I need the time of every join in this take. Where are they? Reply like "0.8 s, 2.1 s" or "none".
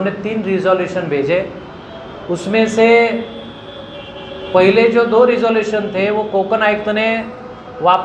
none